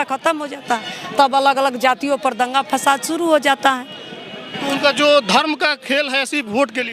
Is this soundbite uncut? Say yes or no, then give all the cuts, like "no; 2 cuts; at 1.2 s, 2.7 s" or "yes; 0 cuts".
yes; 0 cuts